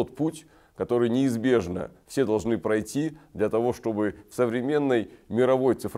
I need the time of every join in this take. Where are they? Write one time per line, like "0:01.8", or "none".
none